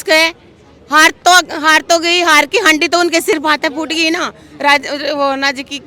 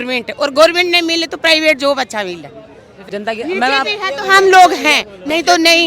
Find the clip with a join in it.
second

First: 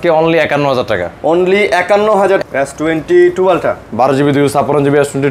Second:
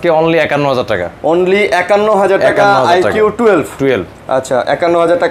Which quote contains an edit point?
first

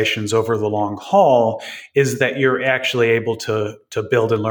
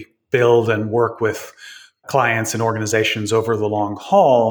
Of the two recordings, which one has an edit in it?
second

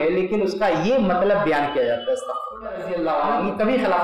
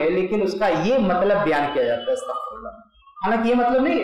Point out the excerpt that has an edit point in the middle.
first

